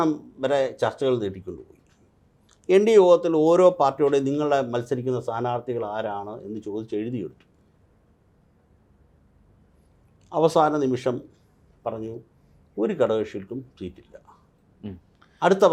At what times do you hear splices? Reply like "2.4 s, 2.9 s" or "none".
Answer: none